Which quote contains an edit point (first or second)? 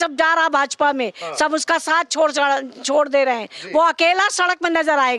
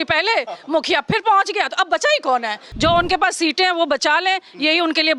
second